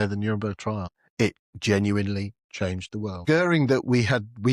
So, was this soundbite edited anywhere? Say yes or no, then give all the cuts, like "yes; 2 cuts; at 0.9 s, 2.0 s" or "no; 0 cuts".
yes; 2 cuts; at 1.0 s, 3.2 s